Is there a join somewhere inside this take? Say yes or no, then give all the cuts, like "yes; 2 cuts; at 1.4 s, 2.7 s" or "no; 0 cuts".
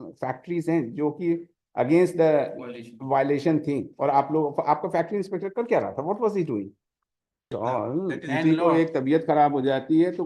yes; 1 cut; at 7.4 s